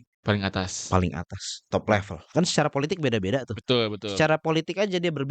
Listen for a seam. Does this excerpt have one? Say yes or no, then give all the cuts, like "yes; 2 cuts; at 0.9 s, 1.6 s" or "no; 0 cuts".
yes; 1 cut; at 2.2 s